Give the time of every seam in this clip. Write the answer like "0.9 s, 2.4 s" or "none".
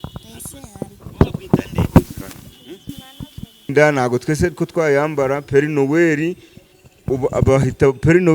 3.7 s